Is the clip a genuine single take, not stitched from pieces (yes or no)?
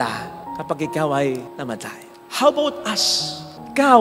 yes